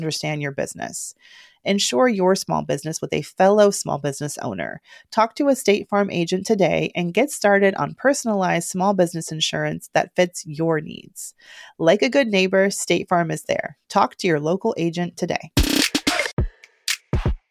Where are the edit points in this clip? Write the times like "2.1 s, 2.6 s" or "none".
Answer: 16.4 s